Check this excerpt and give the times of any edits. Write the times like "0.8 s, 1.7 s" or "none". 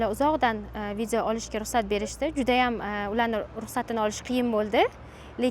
none